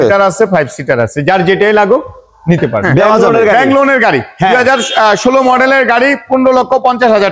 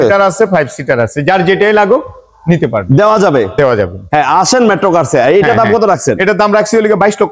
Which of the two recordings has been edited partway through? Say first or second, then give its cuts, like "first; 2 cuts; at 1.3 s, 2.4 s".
first; 1 cut; at 3.2 s